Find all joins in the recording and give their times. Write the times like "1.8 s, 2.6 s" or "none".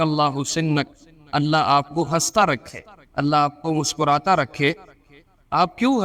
none